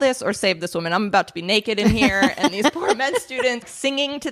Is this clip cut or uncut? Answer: uncut